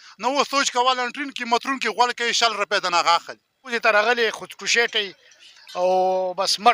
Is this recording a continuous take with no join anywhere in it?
no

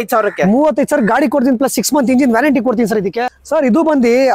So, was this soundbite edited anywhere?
yes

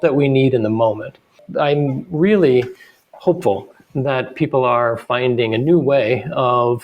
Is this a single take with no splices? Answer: no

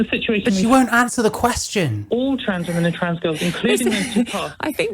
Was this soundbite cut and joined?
yes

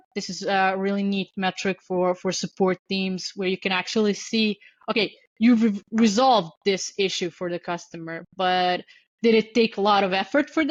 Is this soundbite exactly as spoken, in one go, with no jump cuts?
yes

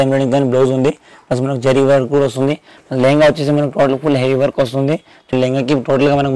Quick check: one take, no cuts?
no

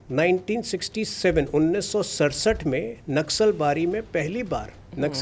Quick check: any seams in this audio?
no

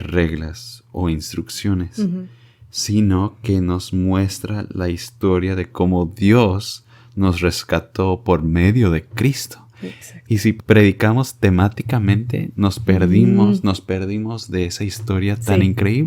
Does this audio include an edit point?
no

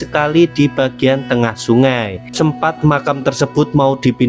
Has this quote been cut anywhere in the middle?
yes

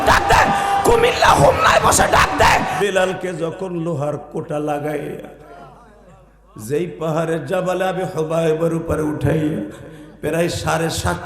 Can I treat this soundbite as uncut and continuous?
no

